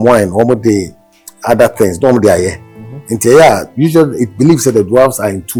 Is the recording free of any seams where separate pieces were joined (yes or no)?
yes